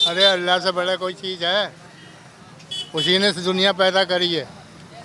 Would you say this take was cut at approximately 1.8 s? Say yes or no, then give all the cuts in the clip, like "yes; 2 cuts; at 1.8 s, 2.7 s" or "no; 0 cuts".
no; 0 cuts